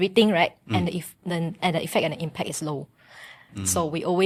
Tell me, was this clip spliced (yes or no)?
no